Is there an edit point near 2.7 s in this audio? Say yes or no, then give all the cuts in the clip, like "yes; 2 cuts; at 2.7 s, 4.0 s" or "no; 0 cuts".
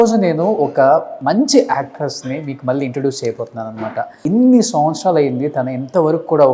no; 2 cuts; at 1.1 s, 4.2 s